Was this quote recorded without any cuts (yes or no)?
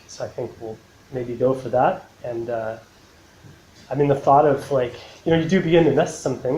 no